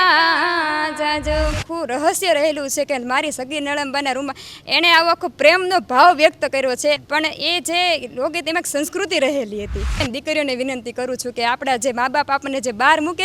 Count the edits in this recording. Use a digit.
3